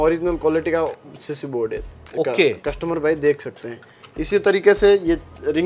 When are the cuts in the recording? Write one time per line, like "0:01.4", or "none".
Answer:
none